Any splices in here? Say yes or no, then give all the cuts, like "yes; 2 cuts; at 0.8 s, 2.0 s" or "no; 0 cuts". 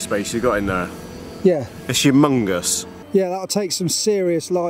yes; 1 cut; at 2.9 s